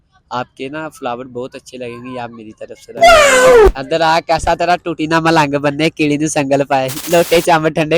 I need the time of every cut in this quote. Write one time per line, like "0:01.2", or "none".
0:03.7
0:07.1